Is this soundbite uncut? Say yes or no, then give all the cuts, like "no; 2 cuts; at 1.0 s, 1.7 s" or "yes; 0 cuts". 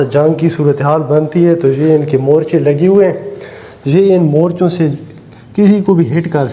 yes; 0 cuts